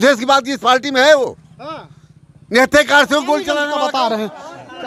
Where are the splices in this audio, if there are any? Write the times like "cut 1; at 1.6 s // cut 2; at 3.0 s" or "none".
cut 1; at 3.6 s